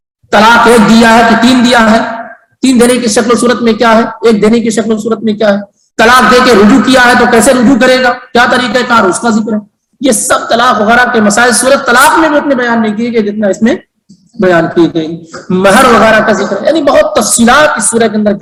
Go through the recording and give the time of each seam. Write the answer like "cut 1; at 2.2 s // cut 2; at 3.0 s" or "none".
none